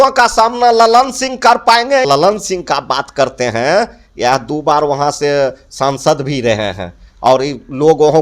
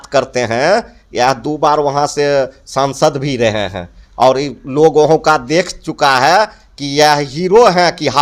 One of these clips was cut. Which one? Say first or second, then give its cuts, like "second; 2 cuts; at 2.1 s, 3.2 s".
first; 1 cut; at 2.0 s